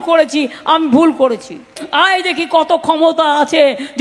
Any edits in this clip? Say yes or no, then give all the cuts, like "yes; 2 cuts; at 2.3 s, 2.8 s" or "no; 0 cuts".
yes; 1 cut; at 1.8 s